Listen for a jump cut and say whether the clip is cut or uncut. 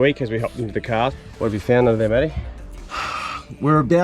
cut